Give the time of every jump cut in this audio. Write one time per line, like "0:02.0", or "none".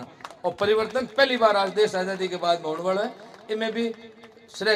none